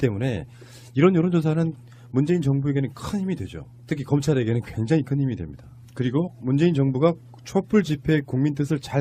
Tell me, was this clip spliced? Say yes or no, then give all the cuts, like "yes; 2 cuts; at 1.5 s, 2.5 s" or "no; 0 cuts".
yes; 1 cut; at 8.0 s